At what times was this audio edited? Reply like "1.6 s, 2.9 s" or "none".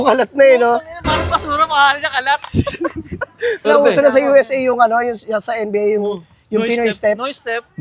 3.6 s